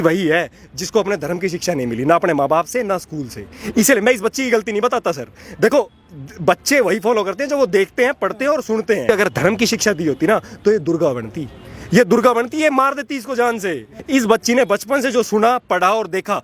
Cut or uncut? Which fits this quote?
cut